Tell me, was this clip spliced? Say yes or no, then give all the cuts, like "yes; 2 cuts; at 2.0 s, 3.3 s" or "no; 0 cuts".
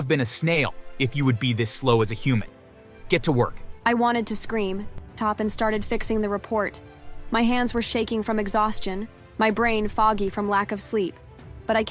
yes; 1 cut; at 5.2 s